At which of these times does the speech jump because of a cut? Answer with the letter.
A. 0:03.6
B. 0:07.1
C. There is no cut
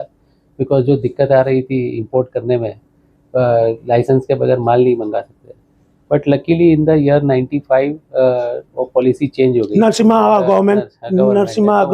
C